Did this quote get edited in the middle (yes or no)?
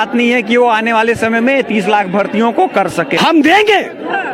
yes